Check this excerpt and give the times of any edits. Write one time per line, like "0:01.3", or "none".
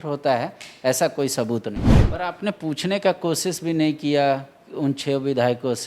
0:01.9